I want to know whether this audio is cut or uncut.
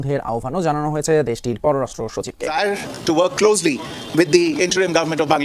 cut